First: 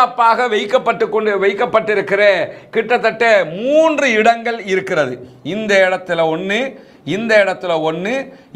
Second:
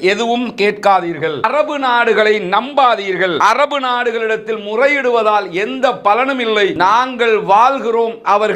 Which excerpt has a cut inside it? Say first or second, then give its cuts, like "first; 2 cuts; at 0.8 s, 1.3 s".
second; 3 cuts; at 1.5 s, 3.4 s, 6.8 s